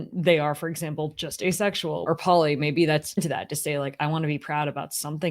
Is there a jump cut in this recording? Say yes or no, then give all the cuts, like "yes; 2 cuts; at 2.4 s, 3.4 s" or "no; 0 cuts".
yes; 2 cuts; at 2.0 s, 3.2 s